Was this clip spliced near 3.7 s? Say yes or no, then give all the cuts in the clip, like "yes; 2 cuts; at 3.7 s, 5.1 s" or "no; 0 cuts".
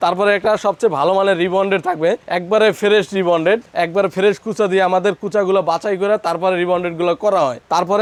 no; 0 cuts